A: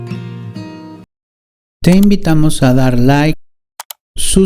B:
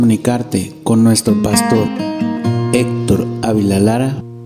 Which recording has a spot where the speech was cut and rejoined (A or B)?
A